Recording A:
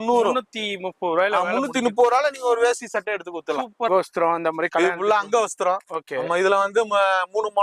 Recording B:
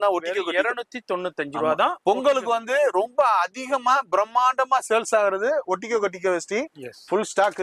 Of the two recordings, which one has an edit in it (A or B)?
A